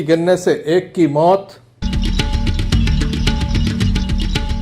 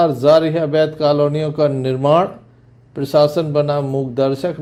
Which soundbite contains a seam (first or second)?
first